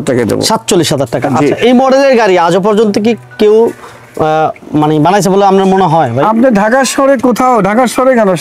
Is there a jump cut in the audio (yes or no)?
no